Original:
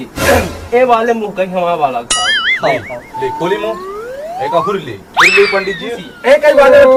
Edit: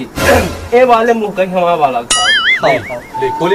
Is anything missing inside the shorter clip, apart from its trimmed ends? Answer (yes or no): no